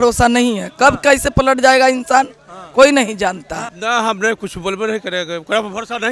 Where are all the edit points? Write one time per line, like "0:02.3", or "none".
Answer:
0:03.7